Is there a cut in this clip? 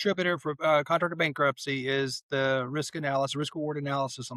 no; 0 cuts

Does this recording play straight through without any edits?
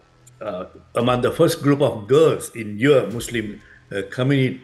yes; 0 cuts

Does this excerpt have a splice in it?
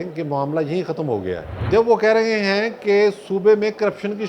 yes; 1 cut; at 1.5 s

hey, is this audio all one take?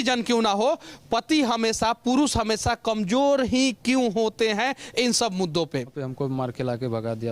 no; 1 cut; at 6.0 s

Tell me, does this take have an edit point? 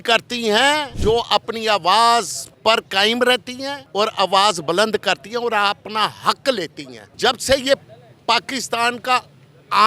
yes; 4 cuts; at 0.9 s, 2.4 s, 3.8 s, 7.1 s

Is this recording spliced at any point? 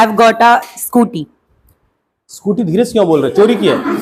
no; 0 cuts

